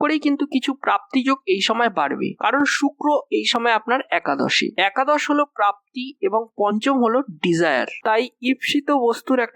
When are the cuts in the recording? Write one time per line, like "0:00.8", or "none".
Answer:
none